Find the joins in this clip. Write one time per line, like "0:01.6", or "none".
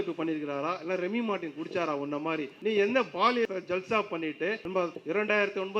0:02.5
0:03.5
0:04.9